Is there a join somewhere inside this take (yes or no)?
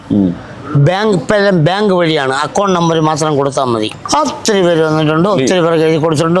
yes